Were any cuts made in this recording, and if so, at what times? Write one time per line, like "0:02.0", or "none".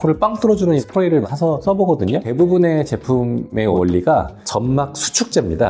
none